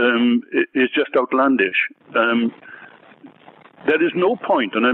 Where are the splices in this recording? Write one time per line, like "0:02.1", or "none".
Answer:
none